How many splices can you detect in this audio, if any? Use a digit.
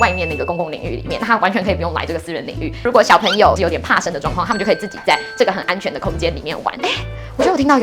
1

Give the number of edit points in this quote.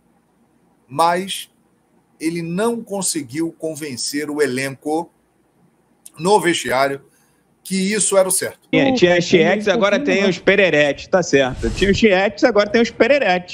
1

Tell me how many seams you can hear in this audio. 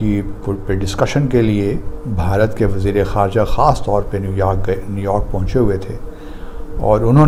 0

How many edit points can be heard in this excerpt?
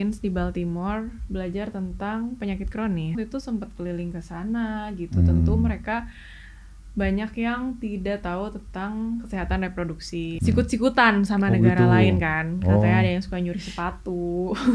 2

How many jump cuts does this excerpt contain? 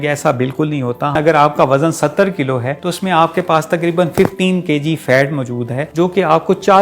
3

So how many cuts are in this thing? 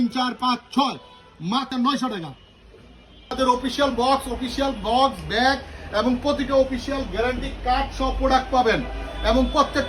2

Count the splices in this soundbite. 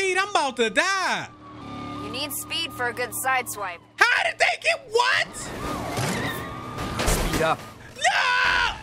1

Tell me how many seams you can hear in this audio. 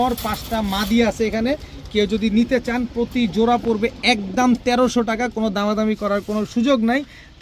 0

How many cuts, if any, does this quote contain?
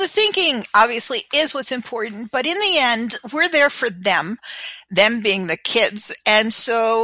0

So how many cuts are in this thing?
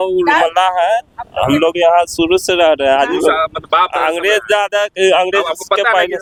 0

